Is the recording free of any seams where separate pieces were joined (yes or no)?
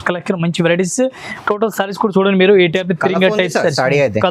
no